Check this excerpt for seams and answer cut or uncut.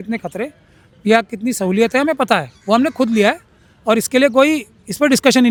uncut